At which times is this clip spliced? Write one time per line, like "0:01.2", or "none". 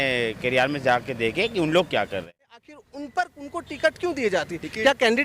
0:02.5